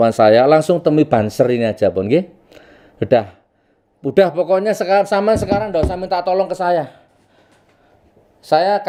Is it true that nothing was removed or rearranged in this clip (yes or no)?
yes